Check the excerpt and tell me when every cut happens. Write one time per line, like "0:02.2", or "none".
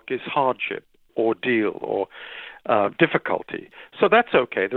0:01.1